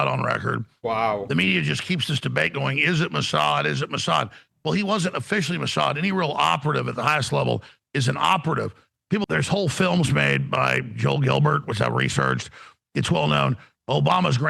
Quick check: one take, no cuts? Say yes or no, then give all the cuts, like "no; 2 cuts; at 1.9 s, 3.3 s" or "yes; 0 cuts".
no; 1 cut; at 9.2 s